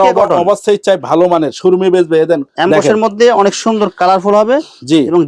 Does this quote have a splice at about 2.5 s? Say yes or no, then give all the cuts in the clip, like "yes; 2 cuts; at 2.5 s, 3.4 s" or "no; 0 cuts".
yes; 1 cut; at 2.5 s